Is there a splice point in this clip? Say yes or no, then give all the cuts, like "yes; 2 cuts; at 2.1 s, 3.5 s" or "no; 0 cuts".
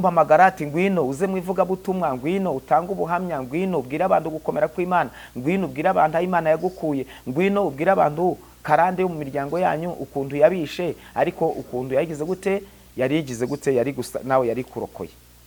no; 0 cuts